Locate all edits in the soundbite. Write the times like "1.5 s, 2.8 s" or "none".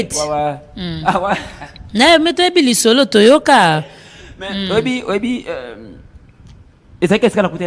none